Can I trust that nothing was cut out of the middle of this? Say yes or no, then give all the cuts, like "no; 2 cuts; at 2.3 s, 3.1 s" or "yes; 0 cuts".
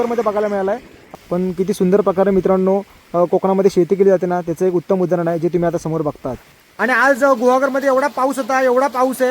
no; 2 cuts; at 1.1 s, 6.6 s